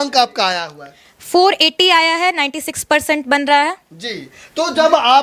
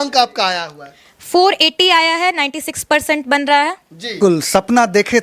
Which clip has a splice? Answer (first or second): second